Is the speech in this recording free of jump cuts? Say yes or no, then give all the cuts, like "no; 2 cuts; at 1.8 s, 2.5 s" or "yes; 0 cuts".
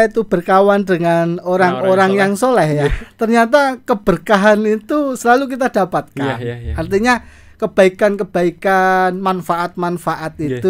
yes; 0 cuts